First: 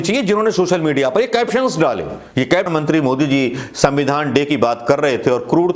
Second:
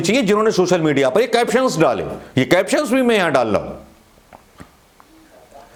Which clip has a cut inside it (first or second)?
first